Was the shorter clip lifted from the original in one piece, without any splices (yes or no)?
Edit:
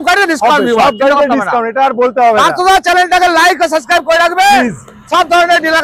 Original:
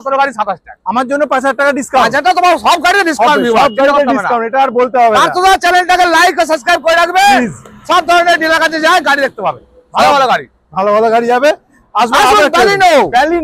yes